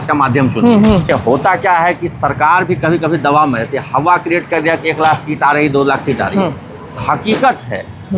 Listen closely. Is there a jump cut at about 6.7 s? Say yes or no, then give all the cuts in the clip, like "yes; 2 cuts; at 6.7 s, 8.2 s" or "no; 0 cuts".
no; 1 cut; at 1.1 s